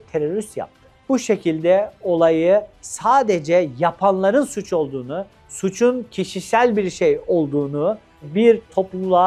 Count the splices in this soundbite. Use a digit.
0